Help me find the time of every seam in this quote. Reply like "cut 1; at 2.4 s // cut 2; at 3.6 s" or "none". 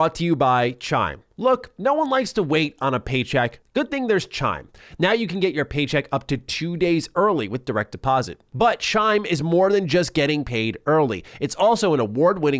cut 1; at 3.6 s // cut 2; at 8.4 s